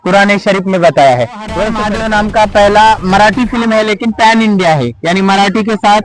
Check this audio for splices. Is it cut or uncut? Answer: cut